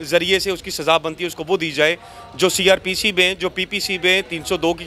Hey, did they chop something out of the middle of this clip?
no; 0 cuts

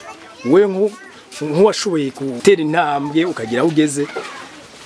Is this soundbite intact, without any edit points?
no; 1 cut; at 2.4 s

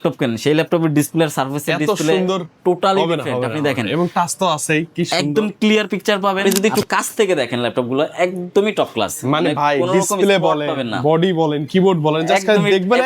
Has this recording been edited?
yes; 1 cut; at 6.4 s

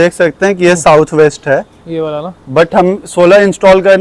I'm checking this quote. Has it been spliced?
no; 0 cuts

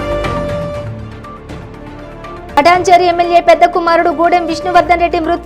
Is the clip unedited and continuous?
no; 1 cut; at 0.9 s

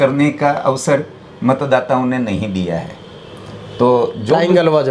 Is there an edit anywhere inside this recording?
no; 0 cuts

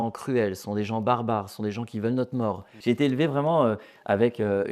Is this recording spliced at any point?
yes; 1 cut; at 2.7 s

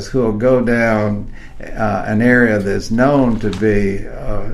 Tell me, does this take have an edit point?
no; 0 cuts

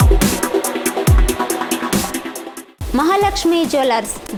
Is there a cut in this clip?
no; 0 cuts

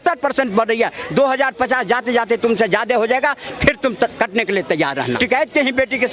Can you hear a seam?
yes; 1 cut; at 5.1 s

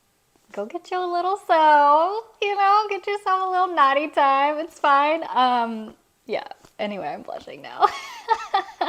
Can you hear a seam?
no; 0 cuts

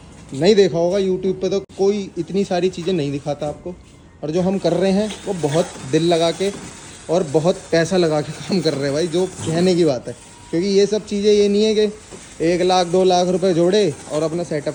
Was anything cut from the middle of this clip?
no; 0 cuts

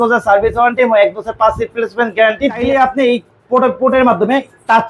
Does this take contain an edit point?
yes; 1 cut; at 2.6 s

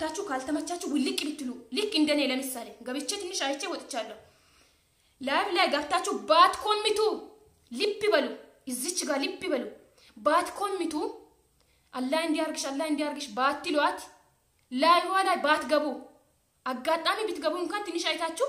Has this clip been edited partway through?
no; 0 cuts

